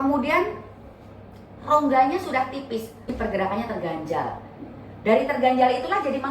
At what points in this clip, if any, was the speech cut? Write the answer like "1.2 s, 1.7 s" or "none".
3.1 s